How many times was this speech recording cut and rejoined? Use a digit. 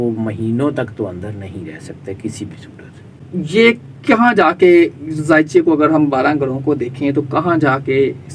1